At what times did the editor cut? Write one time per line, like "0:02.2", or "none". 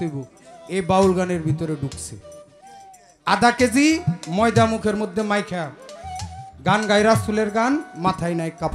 none